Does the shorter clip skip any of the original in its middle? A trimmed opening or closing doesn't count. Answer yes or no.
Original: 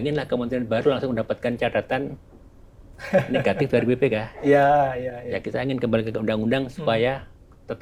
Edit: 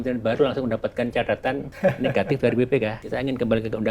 yes